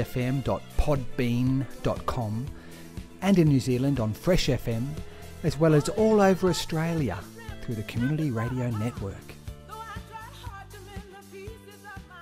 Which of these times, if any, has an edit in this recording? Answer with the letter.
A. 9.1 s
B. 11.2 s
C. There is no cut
A